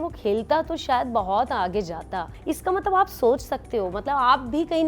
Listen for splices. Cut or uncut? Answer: cut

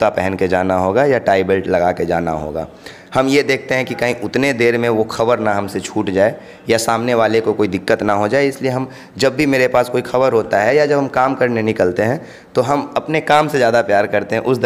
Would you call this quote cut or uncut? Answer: uncut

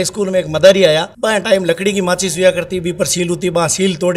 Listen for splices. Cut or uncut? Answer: cut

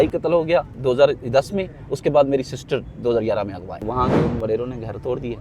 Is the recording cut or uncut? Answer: cut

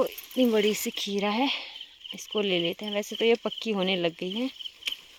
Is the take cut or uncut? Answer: uncut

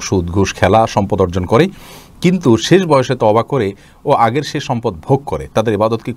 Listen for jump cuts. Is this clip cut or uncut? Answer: uncut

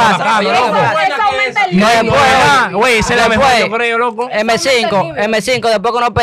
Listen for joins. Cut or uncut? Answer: uncut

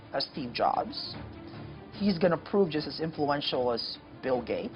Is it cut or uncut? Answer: uncut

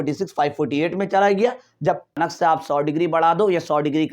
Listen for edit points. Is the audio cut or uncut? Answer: cut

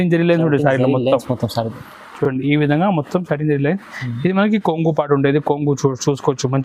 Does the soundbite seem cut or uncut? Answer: uncut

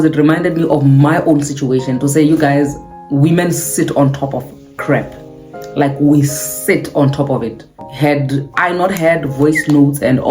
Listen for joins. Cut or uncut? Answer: cut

